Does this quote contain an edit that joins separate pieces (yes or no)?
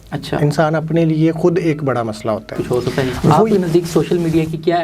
yes